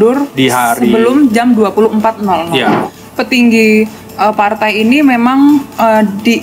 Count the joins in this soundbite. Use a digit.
1